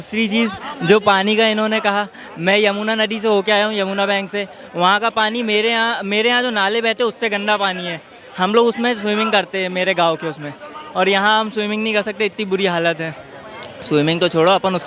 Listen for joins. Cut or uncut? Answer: uncut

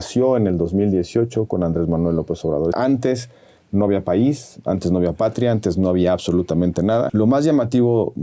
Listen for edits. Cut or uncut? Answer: cut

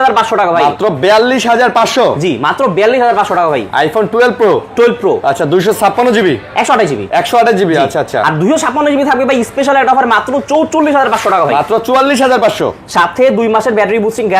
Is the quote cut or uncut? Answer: uncut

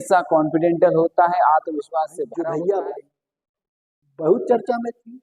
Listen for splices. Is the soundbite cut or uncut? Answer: cut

